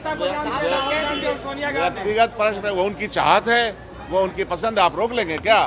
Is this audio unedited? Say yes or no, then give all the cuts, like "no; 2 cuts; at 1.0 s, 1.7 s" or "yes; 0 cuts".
yes; 0 cuts